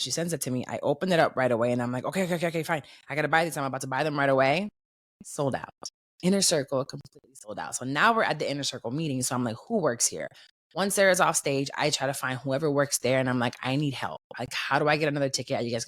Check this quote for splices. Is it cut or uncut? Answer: uncut